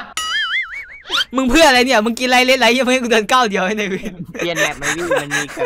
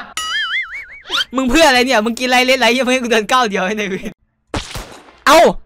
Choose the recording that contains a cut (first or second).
second